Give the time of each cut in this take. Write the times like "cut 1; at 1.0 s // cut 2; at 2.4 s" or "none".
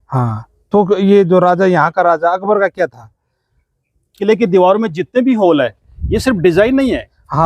cut 1; at 4.1 s